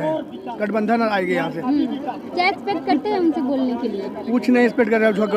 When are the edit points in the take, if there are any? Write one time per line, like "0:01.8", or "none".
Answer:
none